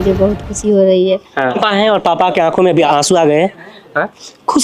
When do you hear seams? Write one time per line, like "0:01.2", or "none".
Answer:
0:01.6
0:02.9